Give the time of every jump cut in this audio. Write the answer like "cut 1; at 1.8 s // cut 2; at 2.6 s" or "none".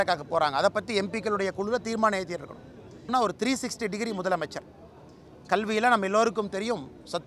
cut 1; at 3.1 s